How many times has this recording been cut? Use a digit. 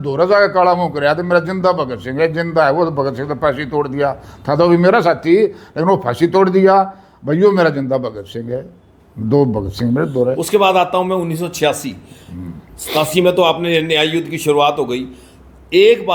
0